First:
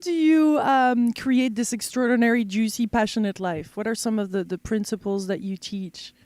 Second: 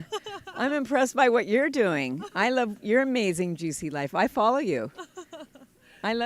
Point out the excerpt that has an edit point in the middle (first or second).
second